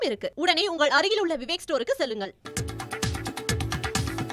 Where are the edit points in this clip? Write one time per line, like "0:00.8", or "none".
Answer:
0:02.4